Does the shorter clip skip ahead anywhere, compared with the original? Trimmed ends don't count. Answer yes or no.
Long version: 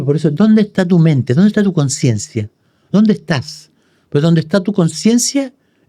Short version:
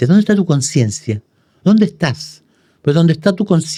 no